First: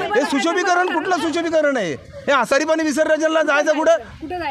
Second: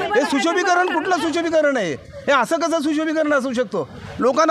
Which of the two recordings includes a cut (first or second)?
first